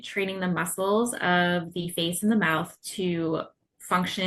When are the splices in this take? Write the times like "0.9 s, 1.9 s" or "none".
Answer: none